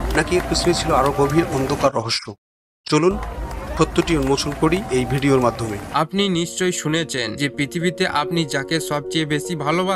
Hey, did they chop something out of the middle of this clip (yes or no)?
yes